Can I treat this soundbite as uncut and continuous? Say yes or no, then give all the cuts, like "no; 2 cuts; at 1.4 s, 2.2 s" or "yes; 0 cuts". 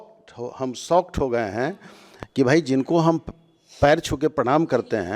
yes; 0 cuts